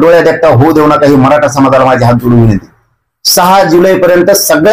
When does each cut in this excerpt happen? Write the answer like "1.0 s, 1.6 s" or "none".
none